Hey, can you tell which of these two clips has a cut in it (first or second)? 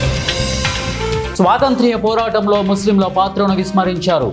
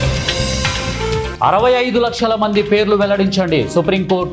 second